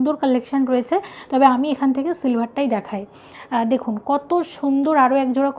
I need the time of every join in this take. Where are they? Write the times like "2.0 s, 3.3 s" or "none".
none